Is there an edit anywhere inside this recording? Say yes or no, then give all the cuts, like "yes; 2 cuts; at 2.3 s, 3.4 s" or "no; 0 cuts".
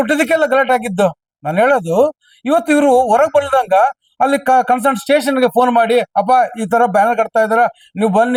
no; 0 cuts